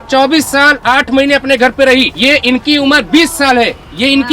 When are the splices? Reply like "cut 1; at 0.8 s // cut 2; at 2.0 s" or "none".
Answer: cut 1; at 2.1 s